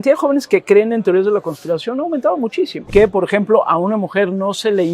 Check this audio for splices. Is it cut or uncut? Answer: cut